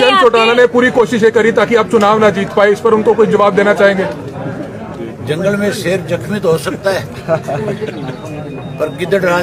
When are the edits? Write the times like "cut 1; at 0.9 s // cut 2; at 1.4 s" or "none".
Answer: none